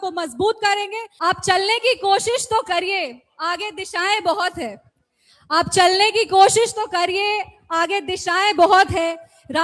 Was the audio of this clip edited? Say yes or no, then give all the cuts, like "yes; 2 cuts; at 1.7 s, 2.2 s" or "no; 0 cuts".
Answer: yes; 1 cut; at 1.0 s